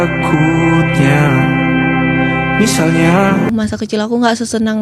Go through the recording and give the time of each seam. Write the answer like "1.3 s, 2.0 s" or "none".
3.5 s